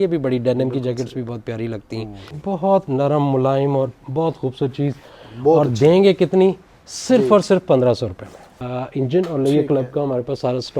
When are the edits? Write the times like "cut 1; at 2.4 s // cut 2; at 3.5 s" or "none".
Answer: cut 1; at 2.3 s // cut 2; at 8.6 s